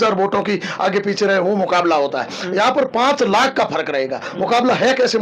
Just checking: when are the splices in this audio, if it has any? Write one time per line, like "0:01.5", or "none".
none